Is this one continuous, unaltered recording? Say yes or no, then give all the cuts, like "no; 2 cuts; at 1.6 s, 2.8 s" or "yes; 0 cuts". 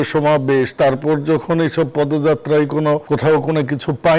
no; 1 cut; at 3.0 s